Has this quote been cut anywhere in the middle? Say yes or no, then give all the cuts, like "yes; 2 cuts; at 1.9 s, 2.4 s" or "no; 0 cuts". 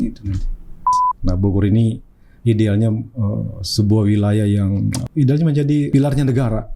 yes; 3 cuts; at 1.0 s, 5.0 s, 5.9 s